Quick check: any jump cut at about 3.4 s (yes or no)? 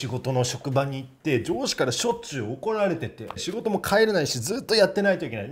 yes